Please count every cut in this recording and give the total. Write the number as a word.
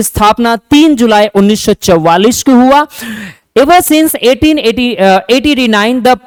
zero